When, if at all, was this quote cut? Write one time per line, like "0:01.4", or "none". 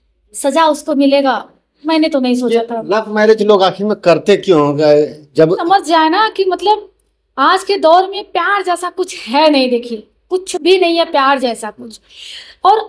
0:05.6